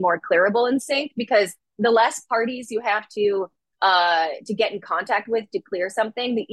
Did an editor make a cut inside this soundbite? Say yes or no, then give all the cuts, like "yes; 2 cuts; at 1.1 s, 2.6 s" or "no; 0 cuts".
no; 0 cuts